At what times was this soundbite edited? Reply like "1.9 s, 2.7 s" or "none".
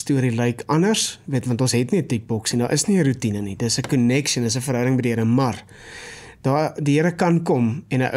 none